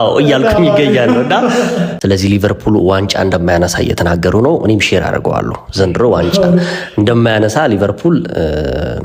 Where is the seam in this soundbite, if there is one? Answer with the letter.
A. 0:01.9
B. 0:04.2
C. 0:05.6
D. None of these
A